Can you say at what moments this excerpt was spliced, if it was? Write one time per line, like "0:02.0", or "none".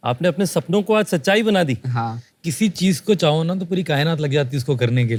none